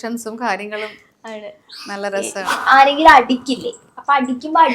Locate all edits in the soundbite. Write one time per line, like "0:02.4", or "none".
0:02.5